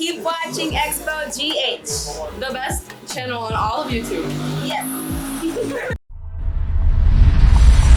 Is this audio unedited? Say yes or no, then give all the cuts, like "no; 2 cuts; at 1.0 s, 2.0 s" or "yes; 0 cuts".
yes; 0 cuts